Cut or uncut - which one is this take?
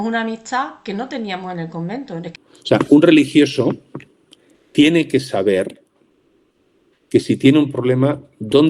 cut